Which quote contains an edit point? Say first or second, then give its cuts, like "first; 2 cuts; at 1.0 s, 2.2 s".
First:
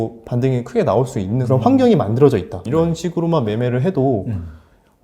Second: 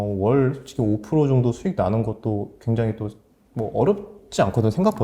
first; 2 cuts; at 1.4 s, 2.6 s